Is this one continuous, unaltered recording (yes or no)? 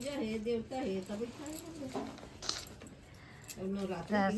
no